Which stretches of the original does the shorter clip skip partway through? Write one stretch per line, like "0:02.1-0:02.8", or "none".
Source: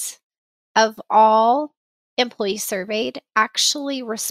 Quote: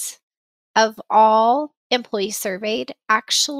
0:01.8-0:02.0